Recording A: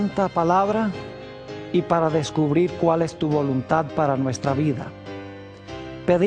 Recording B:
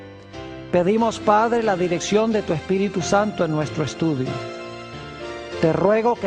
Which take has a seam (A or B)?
B